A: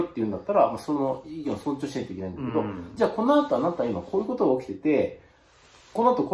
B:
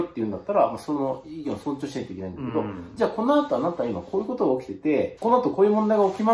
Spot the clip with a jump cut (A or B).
B